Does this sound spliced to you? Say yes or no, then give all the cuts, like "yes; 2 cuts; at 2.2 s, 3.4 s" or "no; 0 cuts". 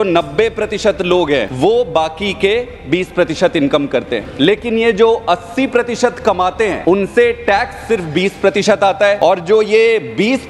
yes; 4 cuts; at 1.5 s, 4.2 s, 6.8 s, 9.2 s